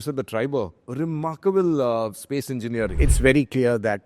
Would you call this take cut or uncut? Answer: cut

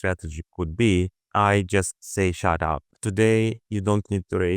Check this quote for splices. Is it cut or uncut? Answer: cut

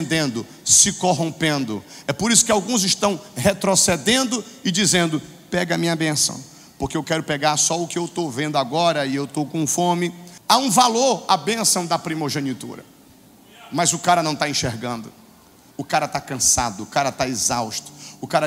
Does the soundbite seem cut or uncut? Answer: cut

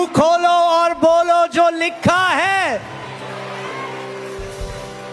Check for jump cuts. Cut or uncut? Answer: uncut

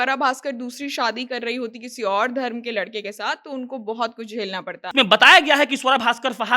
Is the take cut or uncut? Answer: cut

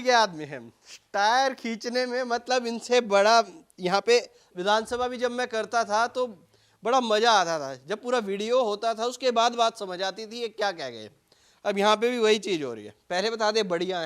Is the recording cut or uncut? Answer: uncut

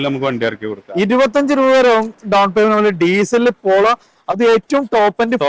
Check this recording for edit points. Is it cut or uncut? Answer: uncut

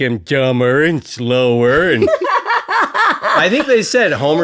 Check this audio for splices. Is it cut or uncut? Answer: uncut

